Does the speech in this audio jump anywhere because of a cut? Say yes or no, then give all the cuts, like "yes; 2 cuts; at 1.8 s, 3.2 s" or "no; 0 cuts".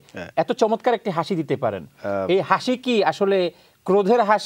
no; 0 cuts